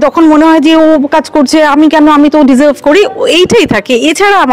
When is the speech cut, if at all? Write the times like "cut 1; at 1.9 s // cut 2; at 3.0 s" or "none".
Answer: none